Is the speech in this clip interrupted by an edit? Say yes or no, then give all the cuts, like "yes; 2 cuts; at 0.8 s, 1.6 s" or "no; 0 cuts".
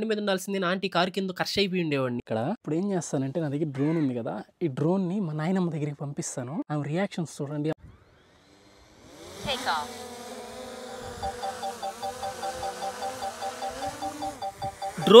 yes; 2 cuts; at 2.2 s, 7.7 s